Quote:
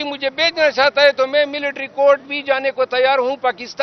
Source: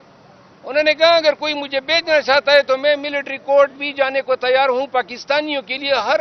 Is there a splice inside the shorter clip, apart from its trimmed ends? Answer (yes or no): no